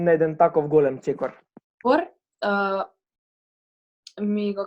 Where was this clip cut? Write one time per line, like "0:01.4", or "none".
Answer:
0:01.8